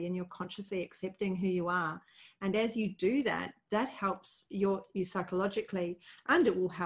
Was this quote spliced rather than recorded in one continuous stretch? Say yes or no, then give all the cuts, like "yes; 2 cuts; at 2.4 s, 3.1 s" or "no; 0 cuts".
no; 0 cuts